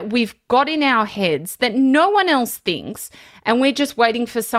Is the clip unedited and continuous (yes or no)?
yes